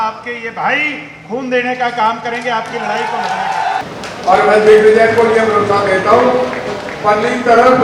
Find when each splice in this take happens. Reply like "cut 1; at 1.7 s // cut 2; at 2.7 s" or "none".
cut 1; at 3.8 s